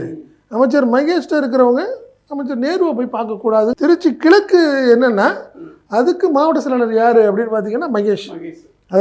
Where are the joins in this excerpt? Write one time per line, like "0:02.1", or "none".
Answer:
0:03.7